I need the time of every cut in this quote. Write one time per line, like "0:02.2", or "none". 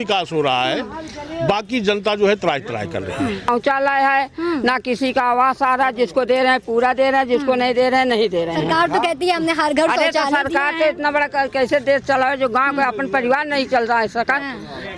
0:03.5